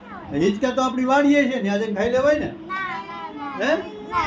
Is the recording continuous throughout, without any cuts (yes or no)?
yes